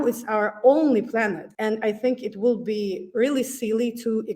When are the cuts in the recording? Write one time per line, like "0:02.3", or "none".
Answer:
0:01.5